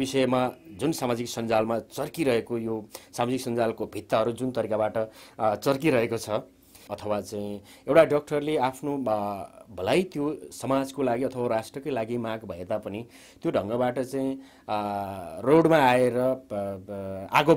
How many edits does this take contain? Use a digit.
1